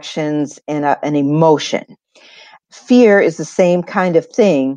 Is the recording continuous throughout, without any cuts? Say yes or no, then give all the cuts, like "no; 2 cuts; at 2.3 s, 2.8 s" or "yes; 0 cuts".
no; 1 cut; at 2.3 s